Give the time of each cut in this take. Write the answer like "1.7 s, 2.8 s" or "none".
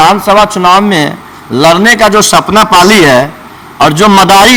none